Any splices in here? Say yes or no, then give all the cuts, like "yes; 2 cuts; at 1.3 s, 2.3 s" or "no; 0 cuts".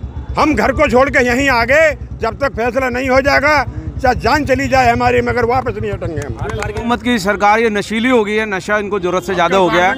yes; 1 cut; at 6.9 s